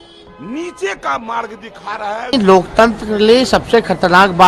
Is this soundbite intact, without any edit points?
no; 1 cut; at 2.3 s

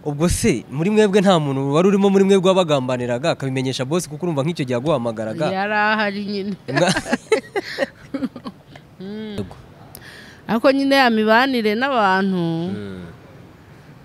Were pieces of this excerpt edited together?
yes; 1 cut; at 9.5 s

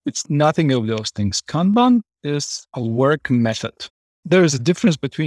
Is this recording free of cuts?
yes; 0 cuts

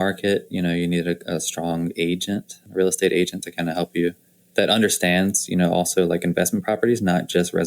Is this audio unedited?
no; 1 cut; at 2.6 s

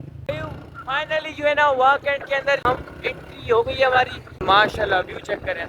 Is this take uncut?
yes; 0 cuts

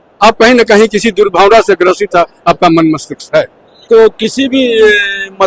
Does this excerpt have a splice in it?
yes; 1 cut; at 3.8 s

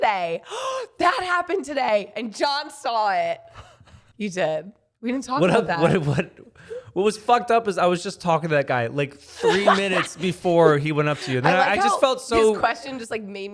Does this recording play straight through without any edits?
yes; 0 cuts

